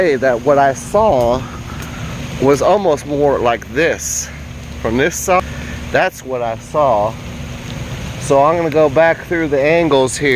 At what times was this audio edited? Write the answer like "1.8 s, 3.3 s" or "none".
5.4 s